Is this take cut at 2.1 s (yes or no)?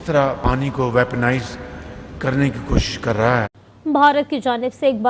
no